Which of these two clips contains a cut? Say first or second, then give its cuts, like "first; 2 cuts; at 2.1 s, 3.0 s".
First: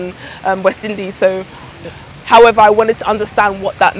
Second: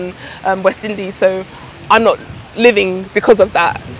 first; 1 cut; at 1.7 s